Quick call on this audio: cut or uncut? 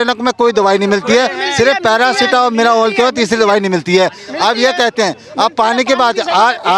uncut